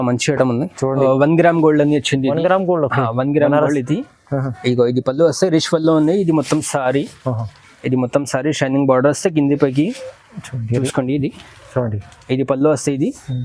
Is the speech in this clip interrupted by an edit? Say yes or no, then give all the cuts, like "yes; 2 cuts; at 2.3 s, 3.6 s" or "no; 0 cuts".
yes; 2 cuts; at 1.0 s, 10.9 s